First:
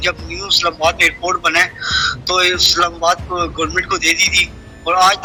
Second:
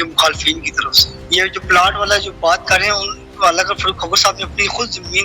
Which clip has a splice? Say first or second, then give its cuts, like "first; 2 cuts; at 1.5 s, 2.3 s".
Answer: second; 1 cut; at 1.2 s